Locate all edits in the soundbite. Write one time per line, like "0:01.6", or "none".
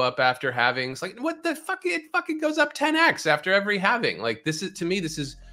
none

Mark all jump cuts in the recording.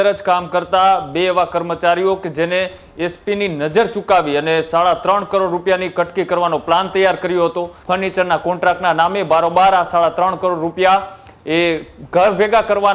0:07.7

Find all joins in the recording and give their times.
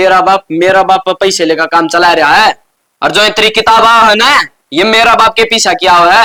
none

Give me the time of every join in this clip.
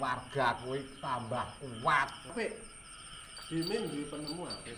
0:02.2

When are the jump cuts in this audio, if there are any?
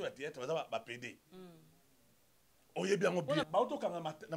0:03.4

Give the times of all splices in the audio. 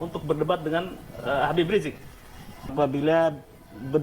0:02.7

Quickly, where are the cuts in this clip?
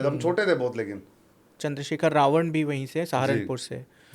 0:01.6

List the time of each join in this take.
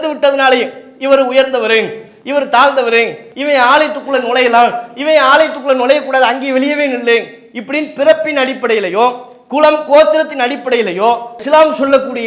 0:03.2

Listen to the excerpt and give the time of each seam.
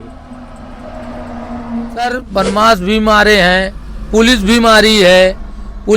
0:02.0

